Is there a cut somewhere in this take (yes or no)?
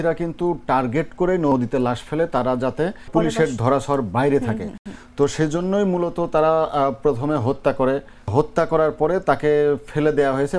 yes